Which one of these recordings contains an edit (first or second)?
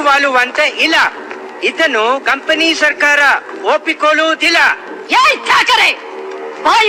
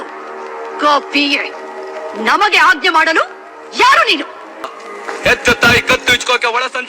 second